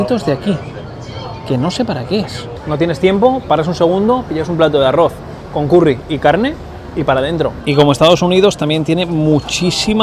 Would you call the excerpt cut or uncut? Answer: cut